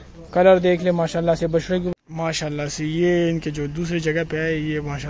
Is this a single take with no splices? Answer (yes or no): no